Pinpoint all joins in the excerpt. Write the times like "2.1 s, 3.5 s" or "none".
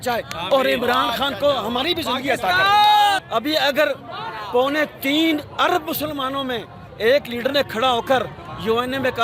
3.2 s